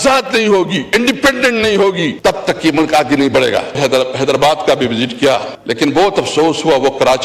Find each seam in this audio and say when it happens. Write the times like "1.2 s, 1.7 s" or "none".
2.1 s, 3.8 s, 5.6 s